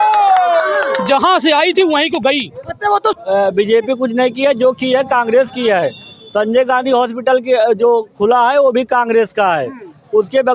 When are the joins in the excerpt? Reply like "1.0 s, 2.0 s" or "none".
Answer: 3.2 s